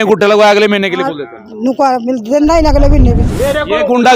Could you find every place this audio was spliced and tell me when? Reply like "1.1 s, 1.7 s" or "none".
3.3 s